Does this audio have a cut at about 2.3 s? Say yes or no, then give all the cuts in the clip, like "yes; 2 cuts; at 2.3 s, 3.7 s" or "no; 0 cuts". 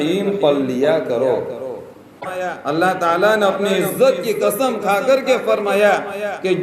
yes; 1 cut; at 2.3 s